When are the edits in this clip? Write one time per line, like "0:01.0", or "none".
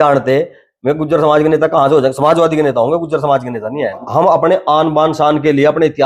0:04.0